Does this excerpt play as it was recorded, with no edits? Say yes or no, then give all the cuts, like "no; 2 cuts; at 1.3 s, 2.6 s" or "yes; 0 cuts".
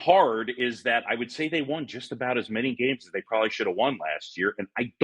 yes; 0 cuts